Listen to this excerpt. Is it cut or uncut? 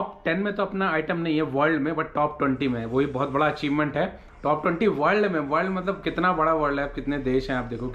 uncut